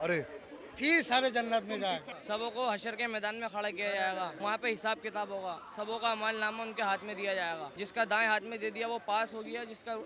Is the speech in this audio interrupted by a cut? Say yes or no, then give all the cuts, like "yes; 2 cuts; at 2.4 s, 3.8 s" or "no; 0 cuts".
yes; 3 cuts; at 2.1 s, 4.3 s, 7.8 s